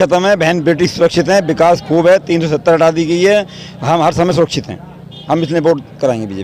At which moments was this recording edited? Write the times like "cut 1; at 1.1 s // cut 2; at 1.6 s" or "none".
none